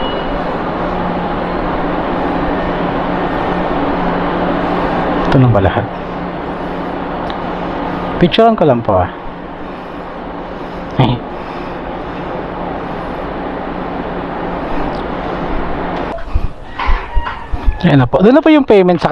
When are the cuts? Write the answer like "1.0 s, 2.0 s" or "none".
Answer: 16.1 s